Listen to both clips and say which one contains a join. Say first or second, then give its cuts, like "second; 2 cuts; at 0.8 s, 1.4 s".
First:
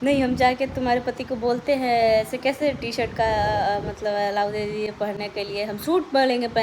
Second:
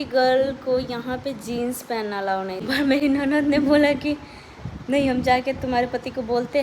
second; 1 cut; at 2.6 s